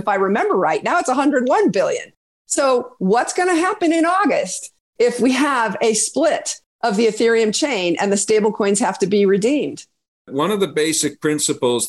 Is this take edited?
yes; 1 cut; at 10.3 s

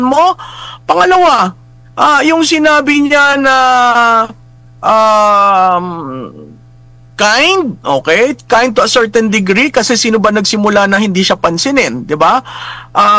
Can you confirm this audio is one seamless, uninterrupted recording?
yes; 0 cuts

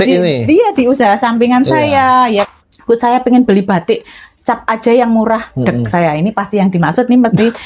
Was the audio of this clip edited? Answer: yes; 1 cut; at 2.5 s

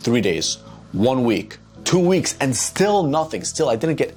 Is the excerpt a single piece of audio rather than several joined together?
yes; 0 cuts

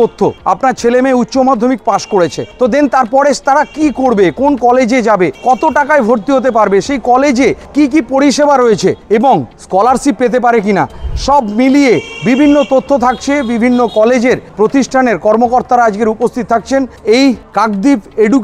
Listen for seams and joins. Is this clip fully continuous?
yes; 0 cuts

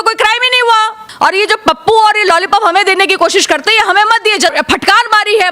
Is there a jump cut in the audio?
yes; 2 cuts; at 1.0 s, 4.5 s

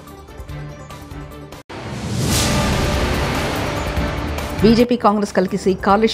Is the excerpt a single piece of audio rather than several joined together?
yes; 0 cuts

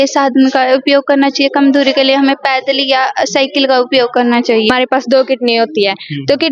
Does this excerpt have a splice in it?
yes; 1 cut; at 4.7 s

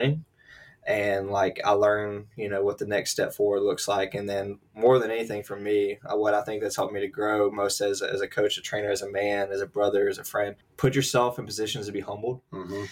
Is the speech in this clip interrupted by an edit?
yes; 1 cut; at 10.6 s

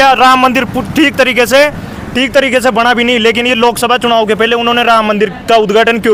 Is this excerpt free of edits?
yes; 0 cuts

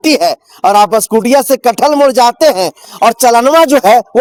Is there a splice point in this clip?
no; 0 cuts

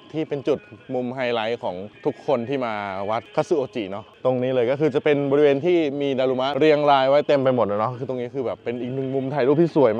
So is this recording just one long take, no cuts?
yes; 0 cuts

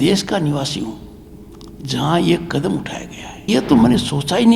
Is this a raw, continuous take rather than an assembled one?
no; 1 cut; at 3.5 s

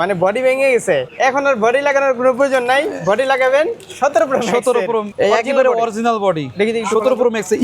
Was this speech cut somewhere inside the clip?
yes; 3 cuts; at 1.1 s, 3.8 s, 5.1 s

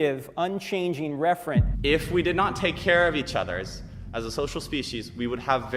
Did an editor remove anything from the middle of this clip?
yes; 1 cut; at 1.7 s

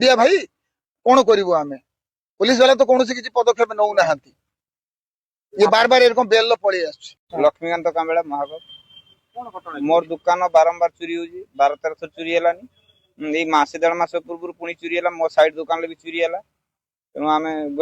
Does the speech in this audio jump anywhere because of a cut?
yes; 1 cut; at 7.3 s

